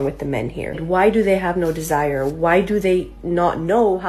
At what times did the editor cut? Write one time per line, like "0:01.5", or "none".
none